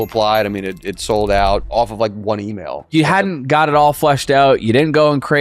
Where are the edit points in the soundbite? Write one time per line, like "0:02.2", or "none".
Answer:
0:01.7
0:02.9

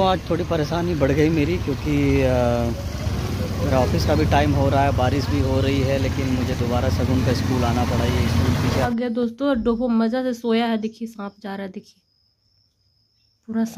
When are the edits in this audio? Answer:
0:08.9

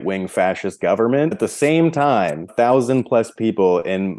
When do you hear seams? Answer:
0:01.4
0:02.5

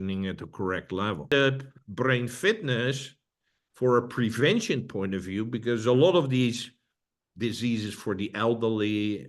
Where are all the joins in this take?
0:01.3

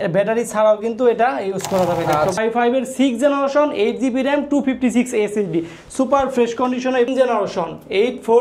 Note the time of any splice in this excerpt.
0:02.4
0:07.1

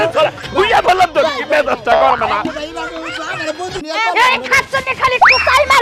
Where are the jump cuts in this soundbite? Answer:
0:03.8

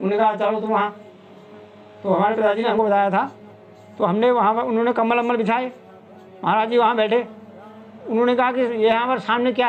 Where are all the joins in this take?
none

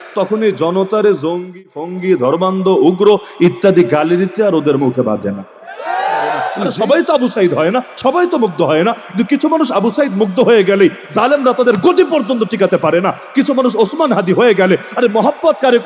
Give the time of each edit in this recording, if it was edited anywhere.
0:06.5

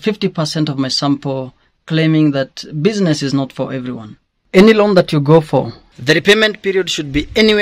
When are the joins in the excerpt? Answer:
0:04.3

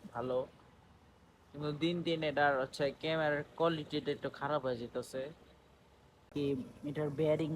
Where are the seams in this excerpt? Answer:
0:06.3

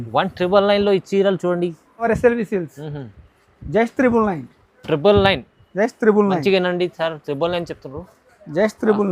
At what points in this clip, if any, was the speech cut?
0:02.1

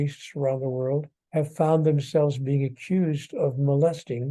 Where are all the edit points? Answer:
0:01.2

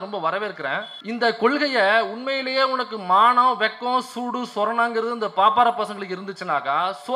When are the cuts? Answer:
0:00.9

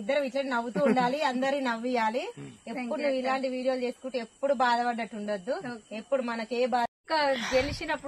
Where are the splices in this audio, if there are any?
0:06.9

